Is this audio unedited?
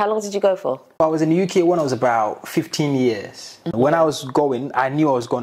no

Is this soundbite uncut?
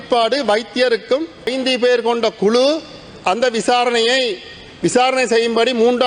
no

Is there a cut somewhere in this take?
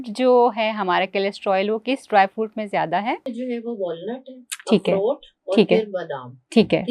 yes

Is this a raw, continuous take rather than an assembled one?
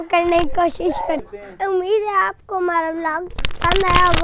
no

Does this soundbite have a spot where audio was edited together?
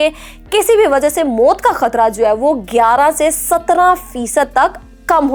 no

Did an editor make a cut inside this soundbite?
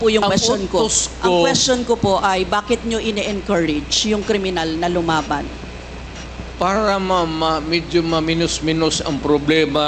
no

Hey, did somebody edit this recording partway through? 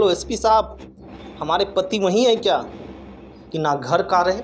yes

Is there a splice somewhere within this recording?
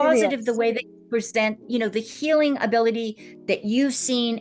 no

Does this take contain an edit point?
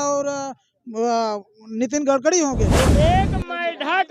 yes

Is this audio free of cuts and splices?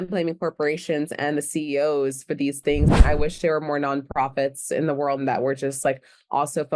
no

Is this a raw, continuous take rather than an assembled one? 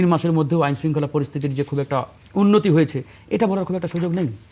no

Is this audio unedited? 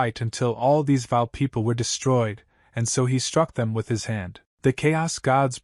yes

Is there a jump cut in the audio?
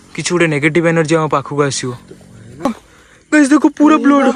yes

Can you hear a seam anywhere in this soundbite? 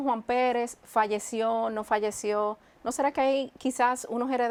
no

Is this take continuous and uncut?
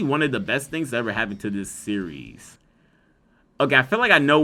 yes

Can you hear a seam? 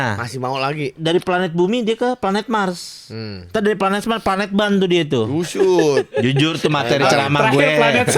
yes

